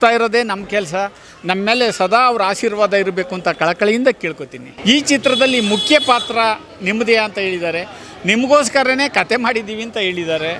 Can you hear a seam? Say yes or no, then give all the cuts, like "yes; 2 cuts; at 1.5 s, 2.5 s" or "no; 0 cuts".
yes; 1 cut; at 4.6 s